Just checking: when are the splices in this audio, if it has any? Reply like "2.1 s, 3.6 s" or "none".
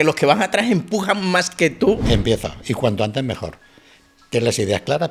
2.0 s